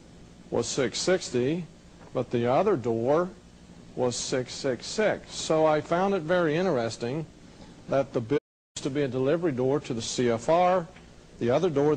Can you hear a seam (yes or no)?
no